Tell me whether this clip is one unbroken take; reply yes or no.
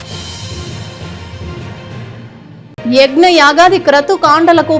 no